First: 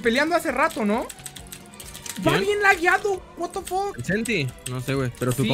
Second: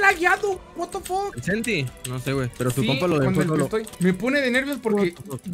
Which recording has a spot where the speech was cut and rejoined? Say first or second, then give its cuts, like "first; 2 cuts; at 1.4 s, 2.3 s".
second; 1 cut; at 3.9 s